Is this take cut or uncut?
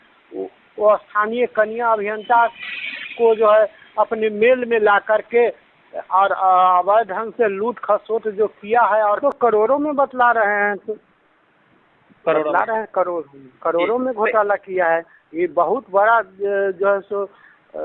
cut